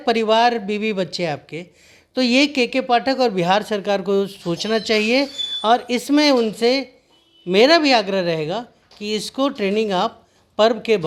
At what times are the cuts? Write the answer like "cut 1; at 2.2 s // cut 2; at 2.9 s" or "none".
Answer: none